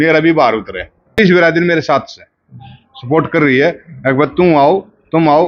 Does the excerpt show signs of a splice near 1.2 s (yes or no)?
yes